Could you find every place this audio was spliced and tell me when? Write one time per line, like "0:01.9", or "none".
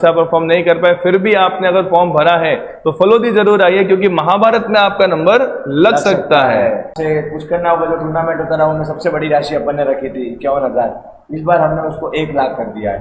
0:07.0

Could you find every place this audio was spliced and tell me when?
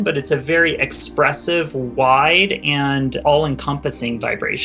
0:03.2

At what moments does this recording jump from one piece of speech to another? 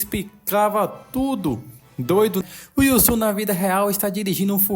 0:02.4

